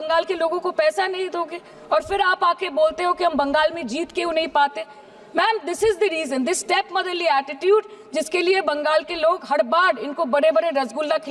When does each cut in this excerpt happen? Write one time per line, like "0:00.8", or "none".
none

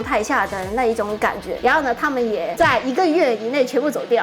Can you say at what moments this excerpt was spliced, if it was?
0:01.5

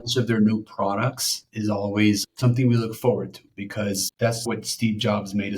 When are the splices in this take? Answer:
0:01.5
0:04.4

